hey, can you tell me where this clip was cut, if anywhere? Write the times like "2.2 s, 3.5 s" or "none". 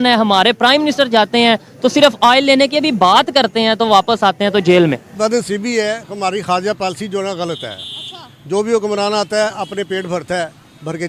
5.4 s